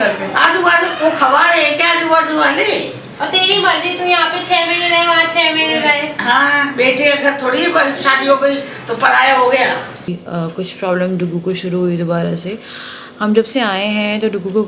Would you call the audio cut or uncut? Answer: cut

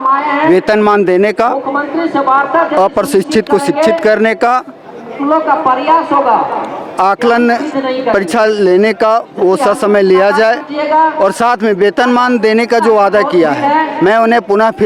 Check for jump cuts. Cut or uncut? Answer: uncut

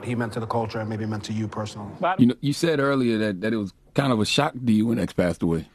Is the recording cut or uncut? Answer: cut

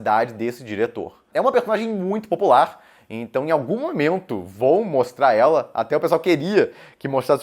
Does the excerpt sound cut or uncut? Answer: cut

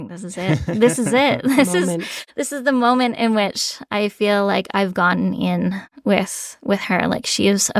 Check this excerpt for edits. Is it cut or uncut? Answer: uncut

